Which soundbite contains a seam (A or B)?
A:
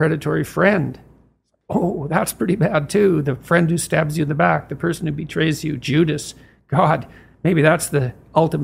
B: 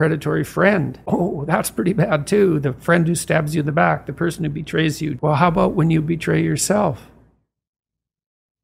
B